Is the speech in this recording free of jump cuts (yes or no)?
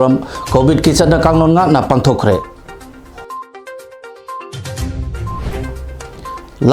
no